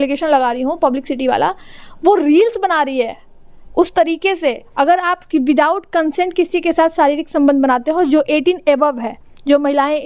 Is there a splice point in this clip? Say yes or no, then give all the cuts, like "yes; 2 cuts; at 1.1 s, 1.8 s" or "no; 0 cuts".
yes; 1 cut; at 4.6 s